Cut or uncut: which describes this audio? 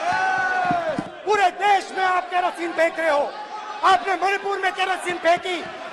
cut